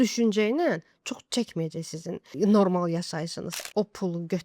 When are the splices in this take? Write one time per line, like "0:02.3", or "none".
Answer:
0:03.5